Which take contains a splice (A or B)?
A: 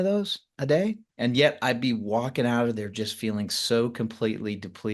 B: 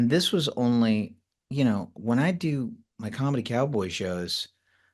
A